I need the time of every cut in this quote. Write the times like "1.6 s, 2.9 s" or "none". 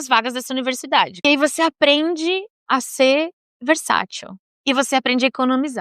1.2 s